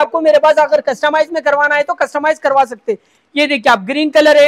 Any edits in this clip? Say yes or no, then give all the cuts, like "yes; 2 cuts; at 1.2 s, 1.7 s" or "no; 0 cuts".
no; 0 cuts